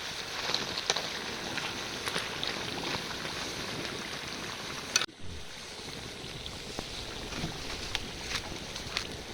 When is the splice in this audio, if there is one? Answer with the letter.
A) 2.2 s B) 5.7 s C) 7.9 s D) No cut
D